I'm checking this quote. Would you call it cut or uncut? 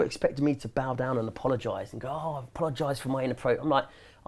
uncut